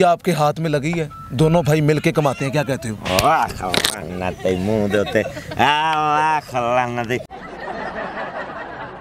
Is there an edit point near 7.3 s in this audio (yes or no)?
yes